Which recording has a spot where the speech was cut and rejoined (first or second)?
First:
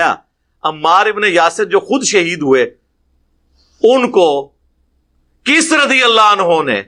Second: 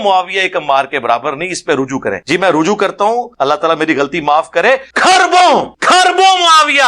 second